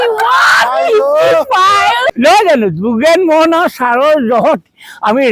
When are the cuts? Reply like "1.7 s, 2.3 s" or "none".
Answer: 2.1 s